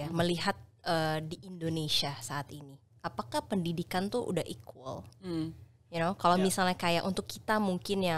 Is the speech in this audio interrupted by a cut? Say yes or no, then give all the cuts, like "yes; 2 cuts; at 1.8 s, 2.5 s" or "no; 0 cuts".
no; 0 cuts